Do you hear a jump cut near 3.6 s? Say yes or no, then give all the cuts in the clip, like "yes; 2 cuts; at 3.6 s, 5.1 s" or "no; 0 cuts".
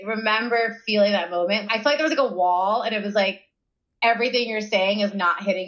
no; 0 cuts